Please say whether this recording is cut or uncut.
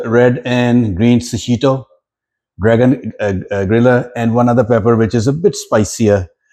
uncut